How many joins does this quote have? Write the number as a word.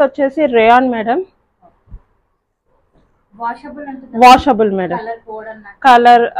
zero